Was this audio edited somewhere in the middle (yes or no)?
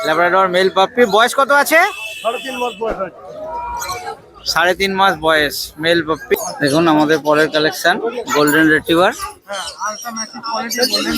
yes